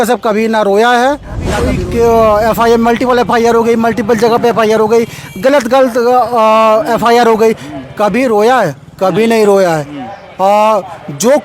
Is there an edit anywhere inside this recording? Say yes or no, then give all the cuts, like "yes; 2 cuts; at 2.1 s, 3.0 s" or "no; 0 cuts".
yes; 1 cut; at 1.7 s